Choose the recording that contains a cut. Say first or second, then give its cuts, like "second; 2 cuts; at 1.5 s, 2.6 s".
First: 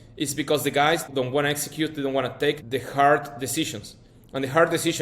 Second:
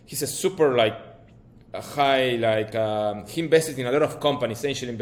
first; 2 cuts; at 1.1 s, 2.6 s